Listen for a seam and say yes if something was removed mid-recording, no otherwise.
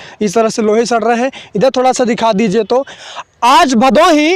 yes